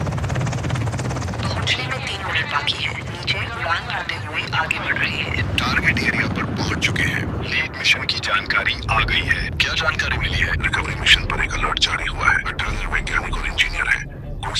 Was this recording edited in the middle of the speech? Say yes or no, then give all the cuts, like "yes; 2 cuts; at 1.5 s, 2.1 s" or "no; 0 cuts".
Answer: no; 0 cuts